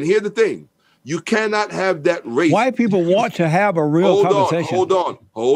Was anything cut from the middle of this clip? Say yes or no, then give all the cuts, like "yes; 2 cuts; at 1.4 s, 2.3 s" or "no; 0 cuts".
no; 0 cuts